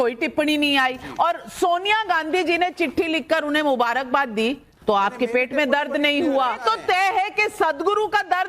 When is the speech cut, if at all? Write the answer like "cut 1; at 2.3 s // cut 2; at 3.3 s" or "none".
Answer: cut 1; at 6.6 s